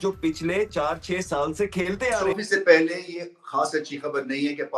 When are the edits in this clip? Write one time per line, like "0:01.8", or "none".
0:02.2

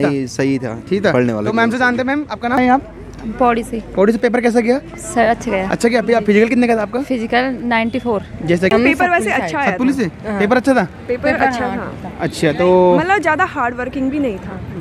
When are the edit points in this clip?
0:02.6
0:08.7

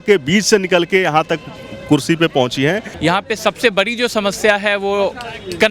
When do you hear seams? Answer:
0:02.9

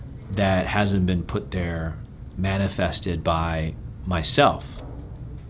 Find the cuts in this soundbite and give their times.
0:02.3

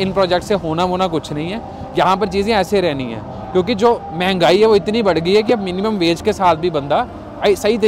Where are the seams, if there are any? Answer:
none

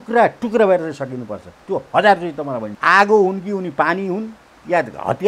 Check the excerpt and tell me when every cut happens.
0:02.7

